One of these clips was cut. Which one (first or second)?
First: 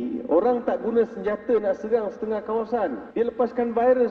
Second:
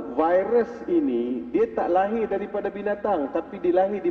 first